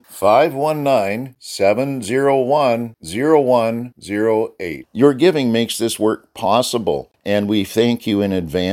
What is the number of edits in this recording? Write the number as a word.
one